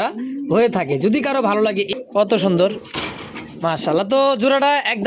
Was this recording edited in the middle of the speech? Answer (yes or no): yes